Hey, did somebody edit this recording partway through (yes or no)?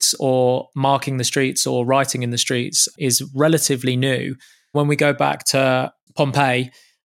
yes